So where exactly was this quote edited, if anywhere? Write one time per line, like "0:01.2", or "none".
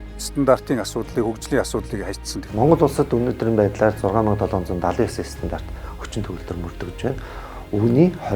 0:02.3

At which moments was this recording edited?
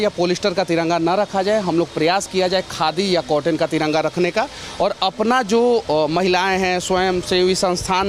none

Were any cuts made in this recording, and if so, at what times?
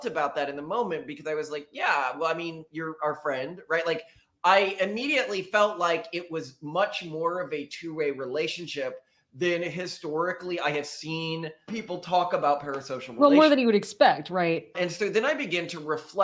0:11.8
0:14.7

